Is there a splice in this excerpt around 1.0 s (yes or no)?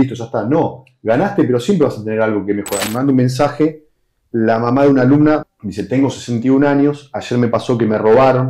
no